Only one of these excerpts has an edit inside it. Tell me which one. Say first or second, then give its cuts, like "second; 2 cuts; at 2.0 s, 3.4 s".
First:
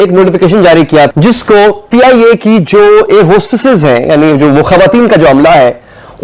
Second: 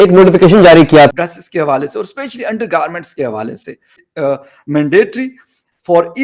second; 2 cuts; at 1.1 s, 4.0 s